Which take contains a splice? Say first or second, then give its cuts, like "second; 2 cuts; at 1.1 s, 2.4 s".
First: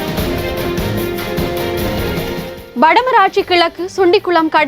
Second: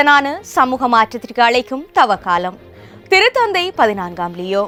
first; 1 cut; at 2.5 s